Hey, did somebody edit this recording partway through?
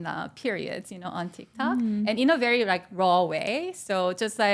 no; 0 cuts

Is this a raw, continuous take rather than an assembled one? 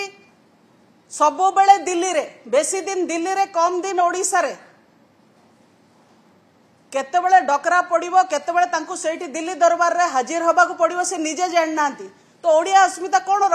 yes; 0 cuts

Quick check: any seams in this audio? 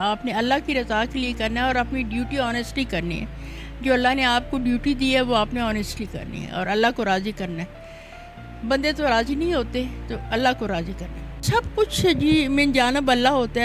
no; 0 cuts

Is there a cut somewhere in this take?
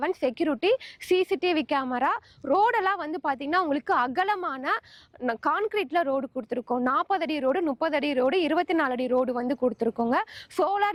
no; 0 cuts

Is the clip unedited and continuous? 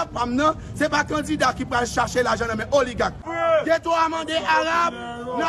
no; 1 cut; at 3.3 s

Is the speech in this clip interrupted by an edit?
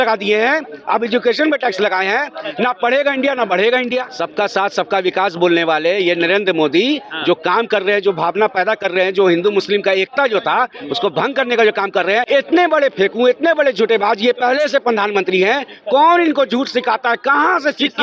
yes; 2 cuts; at 4.2 s, 12.3 s

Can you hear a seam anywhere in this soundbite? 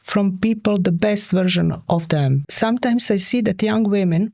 yes; 1 cut; at 2.4 s

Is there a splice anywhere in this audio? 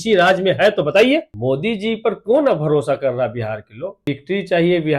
yes; 2 cuts; at 1.3 s, 4.0 s

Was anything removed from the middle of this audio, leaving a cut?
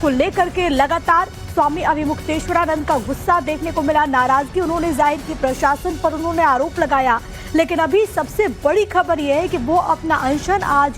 no; 0 cuts

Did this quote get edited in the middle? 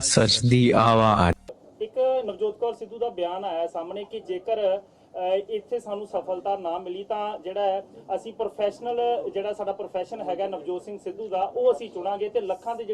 yes; 1 cut; at 1.5 s

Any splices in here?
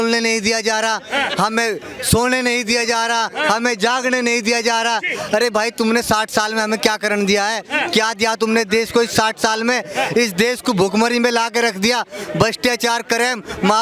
no; 0 cuts

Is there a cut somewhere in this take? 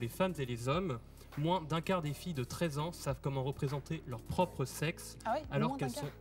no; 0 cuts

